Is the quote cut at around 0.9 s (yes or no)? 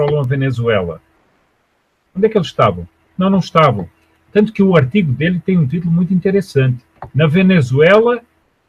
no